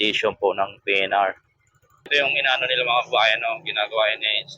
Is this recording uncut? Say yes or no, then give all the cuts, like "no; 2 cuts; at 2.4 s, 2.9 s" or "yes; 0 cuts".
no; 1 cut; at 2.1 s